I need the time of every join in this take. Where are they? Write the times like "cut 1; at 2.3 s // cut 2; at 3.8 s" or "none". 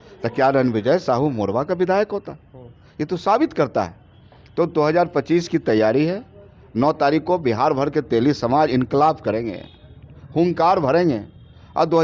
none